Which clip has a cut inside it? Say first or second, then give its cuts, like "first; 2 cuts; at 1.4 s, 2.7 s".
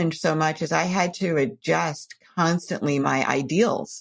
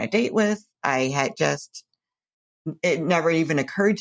first; 1 cut; at 3.0 s